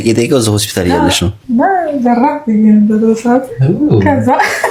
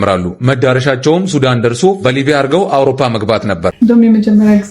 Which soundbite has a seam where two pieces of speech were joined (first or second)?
second